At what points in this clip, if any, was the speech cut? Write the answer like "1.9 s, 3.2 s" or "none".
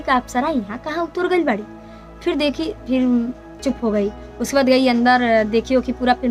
none

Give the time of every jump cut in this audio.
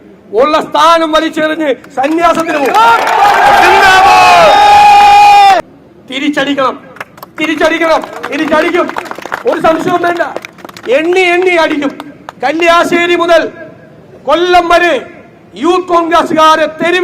5.7 s

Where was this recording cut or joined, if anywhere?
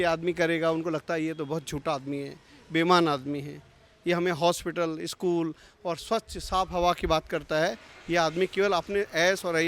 none

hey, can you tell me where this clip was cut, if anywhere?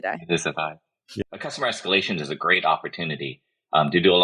1.2 s

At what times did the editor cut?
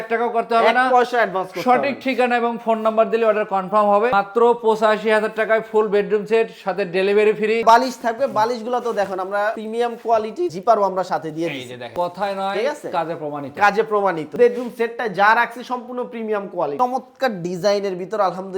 4.1 s, 7.6 s, 11.9 s, 14.3 s, 16.8 s

